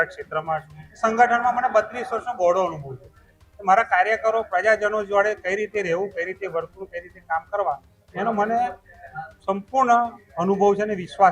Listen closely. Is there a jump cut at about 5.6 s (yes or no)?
no